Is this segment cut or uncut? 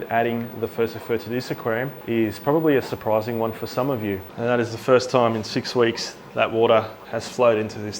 cut